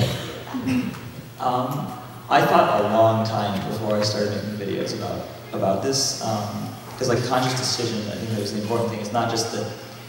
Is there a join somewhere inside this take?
no; 0 cuts

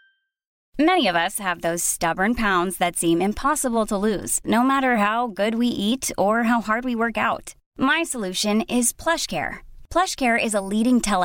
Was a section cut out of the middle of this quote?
no; 0 cuts

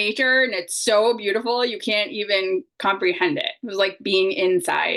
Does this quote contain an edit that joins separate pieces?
no; 0 cuts

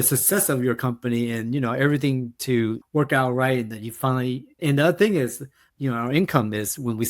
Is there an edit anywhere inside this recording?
yes; 2 cuts; at 4.6 s, 5.8 s

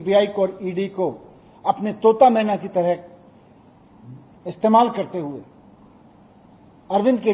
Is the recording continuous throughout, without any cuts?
yes; 0 cuts

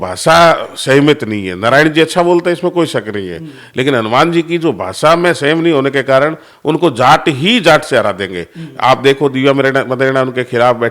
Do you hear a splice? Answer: no; 0 cuts

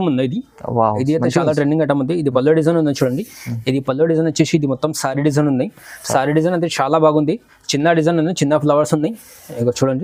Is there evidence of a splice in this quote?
no; 0 cuts

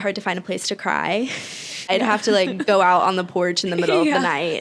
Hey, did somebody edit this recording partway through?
yes; 1 cut; at 1.9 s

